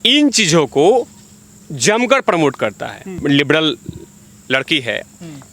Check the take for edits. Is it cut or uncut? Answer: cut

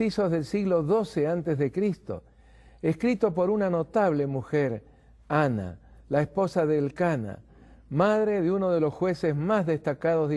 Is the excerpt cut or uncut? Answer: cut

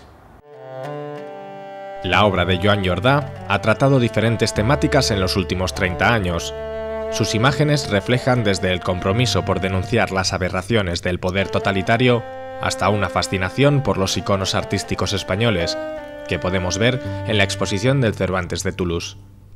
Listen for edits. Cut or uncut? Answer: cut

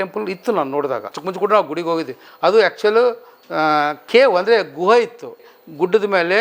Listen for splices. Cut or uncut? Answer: cut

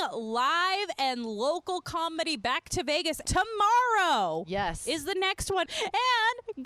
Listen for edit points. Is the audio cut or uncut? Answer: cut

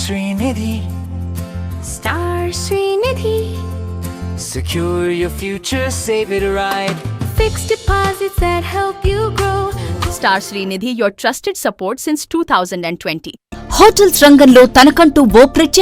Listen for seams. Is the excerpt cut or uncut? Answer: cut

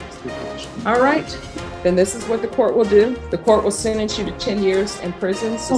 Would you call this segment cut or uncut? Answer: cut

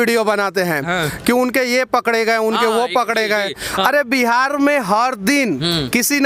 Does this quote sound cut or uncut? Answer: uncut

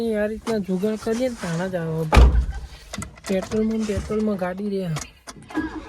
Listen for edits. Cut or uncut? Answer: uncut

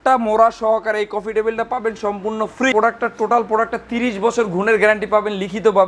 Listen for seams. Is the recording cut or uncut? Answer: cut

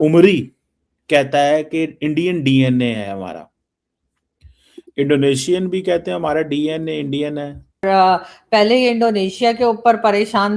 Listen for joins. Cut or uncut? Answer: cut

